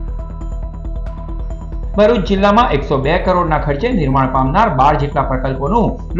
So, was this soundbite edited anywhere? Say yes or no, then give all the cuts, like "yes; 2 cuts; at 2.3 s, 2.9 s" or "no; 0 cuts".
no; 0 cuts